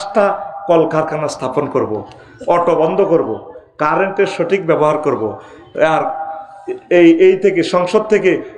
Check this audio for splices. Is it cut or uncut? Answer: uncut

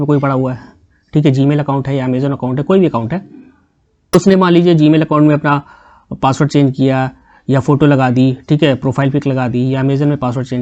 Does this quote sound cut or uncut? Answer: uncut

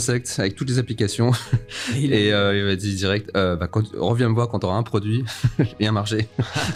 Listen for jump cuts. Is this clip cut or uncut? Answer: uncut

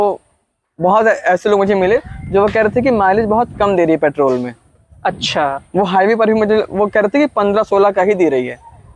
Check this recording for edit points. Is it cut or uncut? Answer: uncut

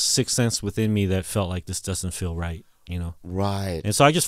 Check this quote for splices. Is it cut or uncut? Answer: uncut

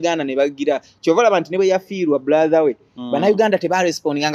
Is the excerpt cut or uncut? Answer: uncut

